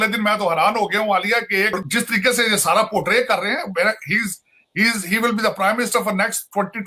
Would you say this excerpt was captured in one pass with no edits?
no; 1 cut; at 1.8 s

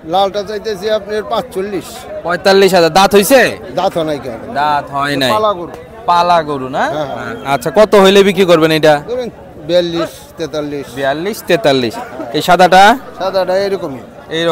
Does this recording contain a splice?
no; 0 cuts

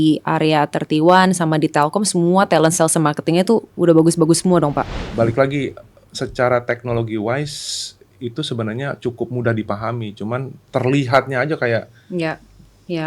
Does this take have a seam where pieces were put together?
yes; 1 cut; at 5.0 s

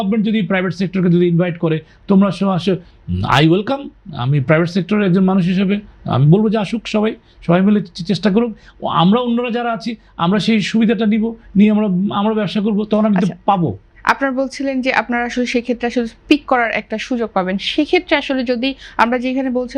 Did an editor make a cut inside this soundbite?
no; 0 cuts

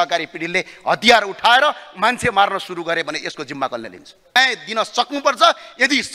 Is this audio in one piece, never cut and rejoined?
no; 1 cut; at 4.4 s

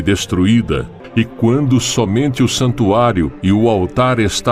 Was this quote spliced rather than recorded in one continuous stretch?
yes; 1 cut; at 0.9 s

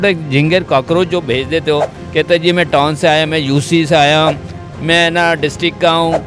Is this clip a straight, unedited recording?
yes; 0 cuts

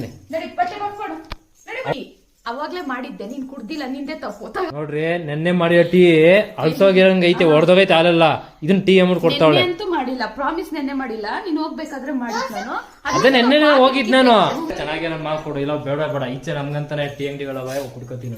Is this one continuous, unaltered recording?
no; 3 cuts; at 1.9 s, 4.7 s, 14.7 s

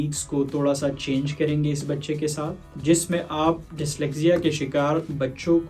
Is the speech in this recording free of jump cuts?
yes; 0 cuts

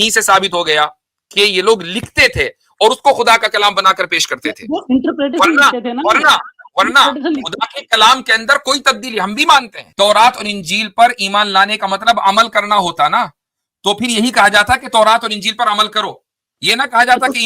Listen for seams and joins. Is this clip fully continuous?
no; 1 cut; at 9.8 s

